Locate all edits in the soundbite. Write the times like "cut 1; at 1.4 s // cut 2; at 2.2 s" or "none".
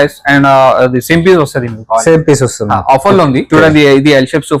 cut 1; at 3.5 s